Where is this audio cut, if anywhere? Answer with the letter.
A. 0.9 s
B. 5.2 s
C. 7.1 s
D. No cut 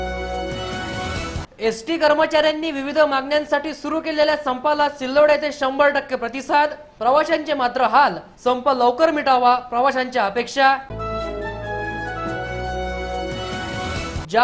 A